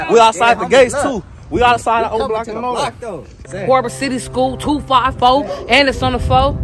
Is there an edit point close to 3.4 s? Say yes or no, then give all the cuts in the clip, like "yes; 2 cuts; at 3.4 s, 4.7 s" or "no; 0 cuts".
yes; 1 cut; at 3.4 s